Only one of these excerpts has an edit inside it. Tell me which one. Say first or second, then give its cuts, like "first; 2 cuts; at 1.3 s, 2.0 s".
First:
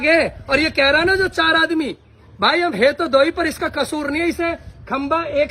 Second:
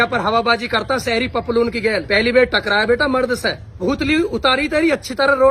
second; 1 cut; at 3.8 s